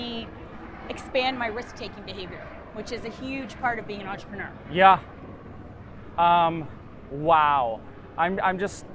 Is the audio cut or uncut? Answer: uncut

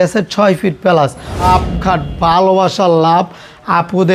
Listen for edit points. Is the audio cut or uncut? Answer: cut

